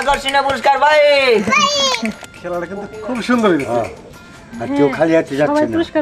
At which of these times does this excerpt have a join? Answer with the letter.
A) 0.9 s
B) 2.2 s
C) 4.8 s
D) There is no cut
B